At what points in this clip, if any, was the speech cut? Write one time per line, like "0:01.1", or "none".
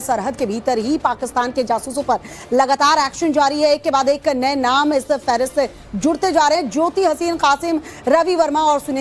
none